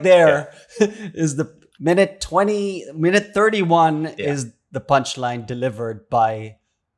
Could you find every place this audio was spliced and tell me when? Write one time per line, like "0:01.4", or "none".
none